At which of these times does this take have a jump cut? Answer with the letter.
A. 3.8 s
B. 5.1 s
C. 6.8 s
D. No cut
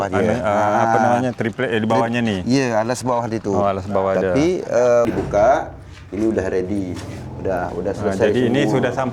B